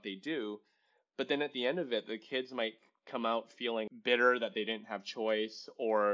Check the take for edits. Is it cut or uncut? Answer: cut